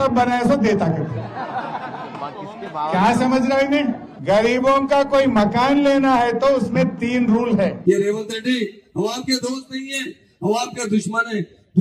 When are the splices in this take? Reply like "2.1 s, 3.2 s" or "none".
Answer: 4.1 s, 7.8 s